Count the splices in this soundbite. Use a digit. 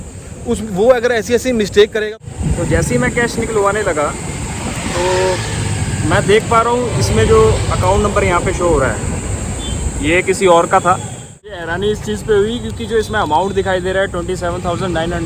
2